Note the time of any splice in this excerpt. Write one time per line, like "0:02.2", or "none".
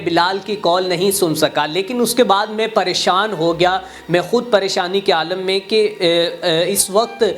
none